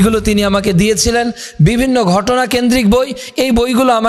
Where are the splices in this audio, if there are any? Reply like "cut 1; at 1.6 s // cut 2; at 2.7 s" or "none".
none